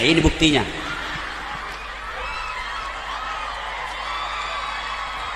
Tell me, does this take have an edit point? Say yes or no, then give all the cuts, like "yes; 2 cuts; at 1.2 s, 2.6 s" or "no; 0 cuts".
no; 0 cuts